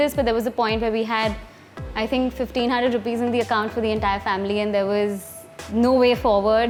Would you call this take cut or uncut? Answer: uncut